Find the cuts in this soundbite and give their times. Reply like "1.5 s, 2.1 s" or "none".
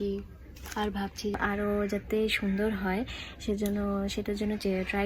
1.4 s